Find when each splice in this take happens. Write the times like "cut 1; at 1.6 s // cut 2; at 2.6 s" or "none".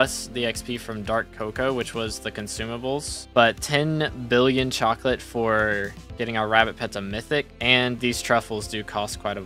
cut 1; at 3.2 s